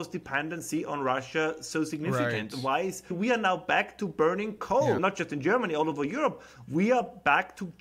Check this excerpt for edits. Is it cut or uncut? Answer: cut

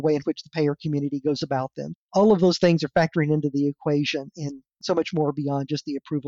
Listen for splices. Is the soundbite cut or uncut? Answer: uncut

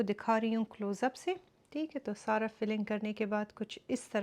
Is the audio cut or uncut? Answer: uncut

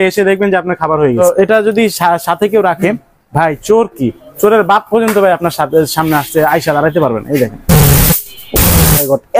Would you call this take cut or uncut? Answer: cut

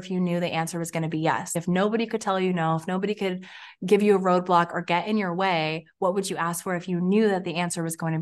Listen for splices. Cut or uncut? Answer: uncut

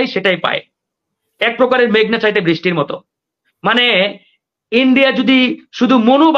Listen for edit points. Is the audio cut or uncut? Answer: uncut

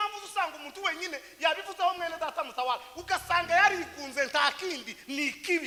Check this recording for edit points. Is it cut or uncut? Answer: uncut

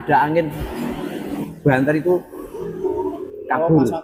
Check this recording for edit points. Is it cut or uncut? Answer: uncut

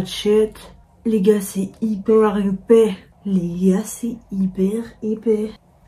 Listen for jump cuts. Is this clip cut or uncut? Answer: uncut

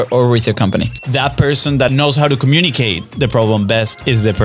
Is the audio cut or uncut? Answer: cut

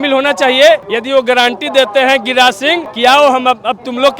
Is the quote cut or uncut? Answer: cut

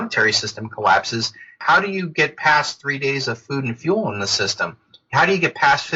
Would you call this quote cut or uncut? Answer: uncut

